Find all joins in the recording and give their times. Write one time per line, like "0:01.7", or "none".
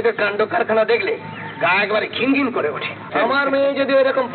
0:03.1